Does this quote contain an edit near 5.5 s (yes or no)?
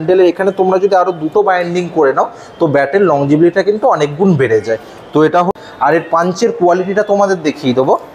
yes